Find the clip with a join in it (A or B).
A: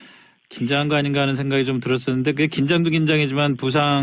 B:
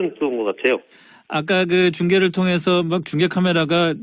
A